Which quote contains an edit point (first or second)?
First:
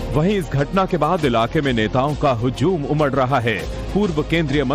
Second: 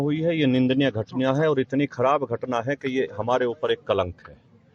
second